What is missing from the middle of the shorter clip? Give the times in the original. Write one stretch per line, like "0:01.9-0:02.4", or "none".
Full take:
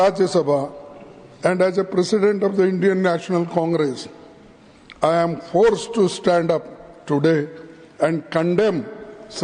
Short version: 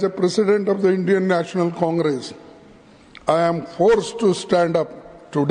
none

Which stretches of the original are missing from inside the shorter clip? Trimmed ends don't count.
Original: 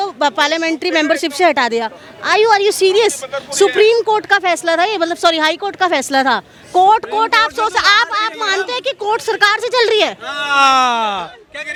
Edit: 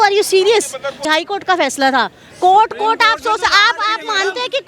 0:03.5-0:05.4

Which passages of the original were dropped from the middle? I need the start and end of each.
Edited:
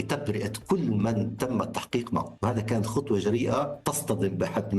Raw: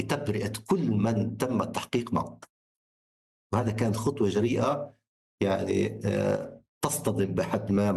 0:02.3-0:03.4
0:04.9-0:06.8

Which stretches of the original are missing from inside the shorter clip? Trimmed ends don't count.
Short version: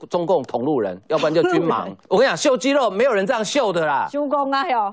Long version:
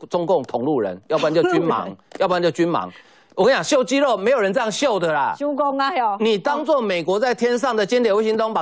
0:01.9-0:03.2

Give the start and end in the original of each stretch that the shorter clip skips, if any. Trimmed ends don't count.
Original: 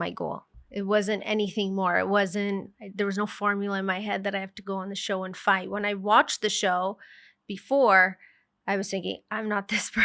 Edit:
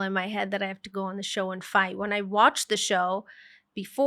none

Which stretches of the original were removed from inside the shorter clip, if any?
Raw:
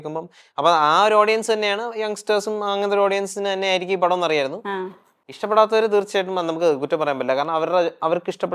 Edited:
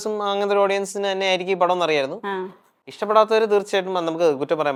none

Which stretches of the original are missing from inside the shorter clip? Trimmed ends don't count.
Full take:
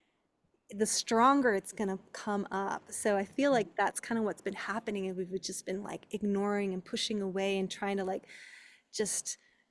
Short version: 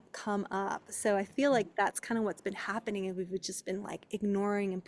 none

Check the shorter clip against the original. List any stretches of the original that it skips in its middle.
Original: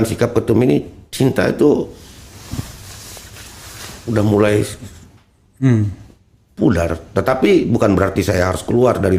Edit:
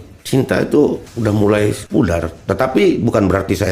0:02.0-0:04.0
0:04.7-0:06.5

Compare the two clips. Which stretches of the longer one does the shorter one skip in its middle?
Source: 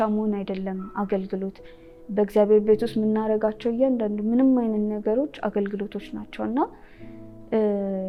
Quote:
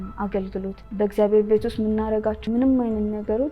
0:01.6-0:02.0
0:03.6-0:04.2

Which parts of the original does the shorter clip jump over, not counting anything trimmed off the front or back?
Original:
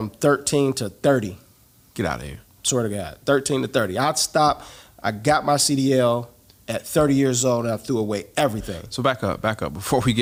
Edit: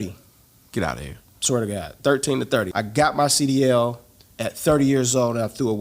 0:03.9-0:05.0

